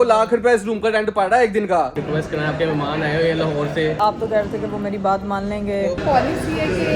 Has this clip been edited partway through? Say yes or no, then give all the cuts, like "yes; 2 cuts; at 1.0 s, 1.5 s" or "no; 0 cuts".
yes; 3 cuts; at 1.9 s, 4.0 s, 6.0 s